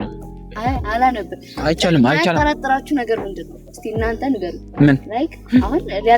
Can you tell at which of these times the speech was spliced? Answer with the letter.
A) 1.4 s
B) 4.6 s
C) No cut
B